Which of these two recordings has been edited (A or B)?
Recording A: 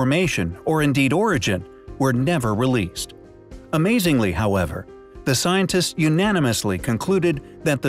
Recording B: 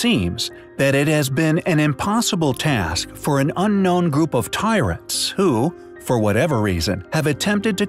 A